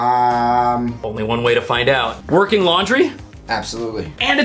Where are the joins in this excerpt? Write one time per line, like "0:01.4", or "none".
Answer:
0:01.0